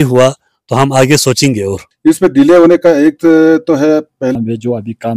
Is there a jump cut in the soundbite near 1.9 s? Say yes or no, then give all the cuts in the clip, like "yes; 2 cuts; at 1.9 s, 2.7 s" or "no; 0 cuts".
yes; 2 cuts; at 1.9 s, 4.3 s